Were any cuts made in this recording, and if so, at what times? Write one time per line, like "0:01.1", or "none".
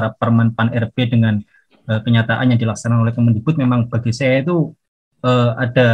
none